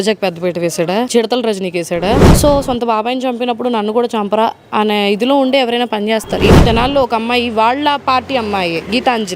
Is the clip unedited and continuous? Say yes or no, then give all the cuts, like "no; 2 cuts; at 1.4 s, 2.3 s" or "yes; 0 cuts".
no; 2 cuts; at 2.3 s, 6.6 s